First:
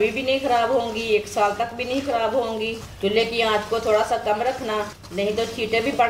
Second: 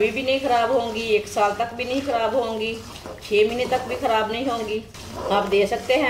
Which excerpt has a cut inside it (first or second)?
first